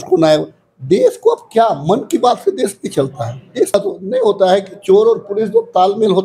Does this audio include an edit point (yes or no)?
yes